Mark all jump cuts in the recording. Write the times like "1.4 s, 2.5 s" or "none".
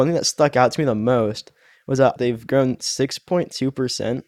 2.0 s

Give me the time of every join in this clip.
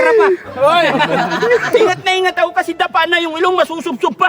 1.4 s

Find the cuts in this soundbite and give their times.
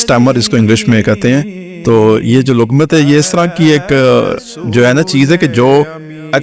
none

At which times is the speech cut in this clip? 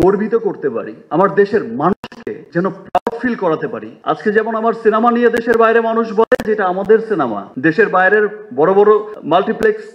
none

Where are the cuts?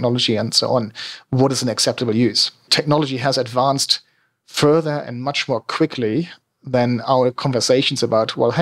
2.7 s

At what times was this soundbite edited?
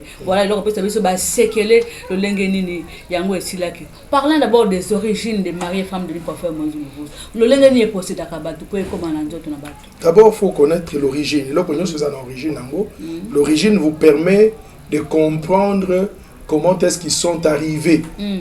none

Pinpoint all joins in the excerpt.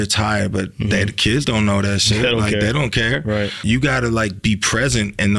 3.5 s

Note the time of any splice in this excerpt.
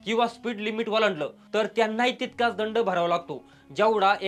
none

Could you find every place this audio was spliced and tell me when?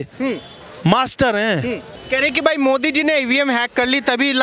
1.9 s

